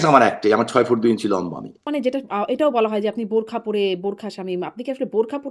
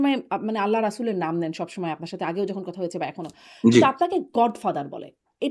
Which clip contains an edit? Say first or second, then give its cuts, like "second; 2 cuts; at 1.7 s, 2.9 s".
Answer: first; 1 cut; at 1.9 s